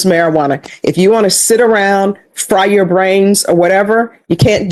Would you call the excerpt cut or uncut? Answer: uncut